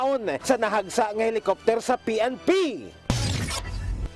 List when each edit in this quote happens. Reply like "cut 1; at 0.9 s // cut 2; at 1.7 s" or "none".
cut 1; at 2.9 s